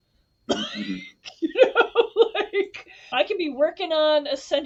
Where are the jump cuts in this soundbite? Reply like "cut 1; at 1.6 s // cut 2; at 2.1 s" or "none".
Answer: none